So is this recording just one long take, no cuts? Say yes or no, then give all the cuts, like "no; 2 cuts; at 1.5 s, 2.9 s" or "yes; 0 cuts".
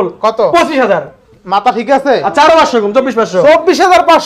yes; 0 cuts